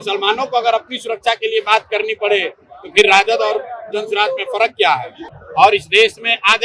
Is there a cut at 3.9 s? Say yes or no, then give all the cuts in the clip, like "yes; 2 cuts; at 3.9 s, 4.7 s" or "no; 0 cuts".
no; 1 cut; at 5.2 s